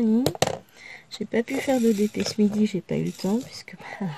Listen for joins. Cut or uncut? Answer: uncut